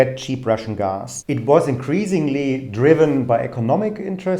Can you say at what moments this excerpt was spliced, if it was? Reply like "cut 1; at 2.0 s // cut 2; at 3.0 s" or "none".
cut 1; at 1.1 s